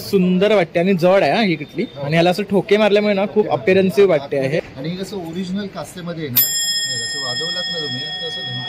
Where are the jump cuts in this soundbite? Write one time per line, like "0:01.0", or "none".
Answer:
0:04.6